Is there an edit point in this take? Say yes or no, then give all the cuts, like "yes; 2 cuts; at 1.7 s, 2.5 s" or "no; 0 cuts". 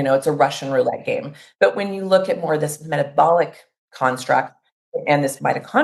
yes; 1 cut; at 1.4 s